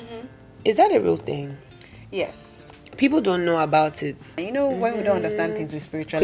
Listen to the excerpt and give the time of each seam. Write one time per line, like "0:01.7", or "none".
0:04.0